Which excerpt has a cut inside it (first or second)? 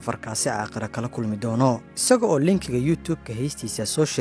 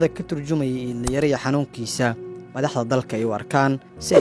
first